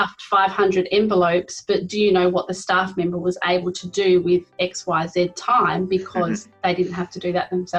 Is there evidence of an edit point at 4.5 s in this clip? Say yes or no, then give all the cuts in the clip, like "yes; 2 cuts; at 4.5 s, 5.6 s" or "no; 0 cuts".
no; 0 cuts